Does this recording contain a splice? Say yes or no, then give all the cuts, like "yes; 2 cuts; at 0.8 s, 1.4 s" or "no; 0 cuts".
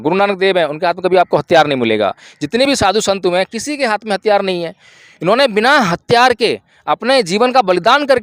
no; 0 cuts